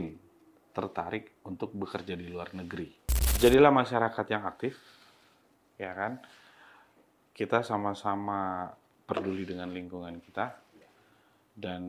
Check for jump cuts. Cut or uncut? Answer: cut